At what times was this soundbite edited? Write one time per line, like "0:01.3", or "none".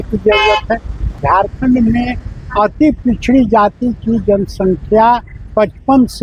0:01.1